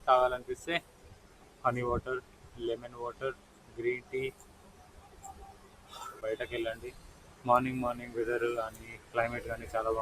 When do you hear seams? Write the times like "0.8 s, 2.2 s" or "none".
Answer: 6.2 s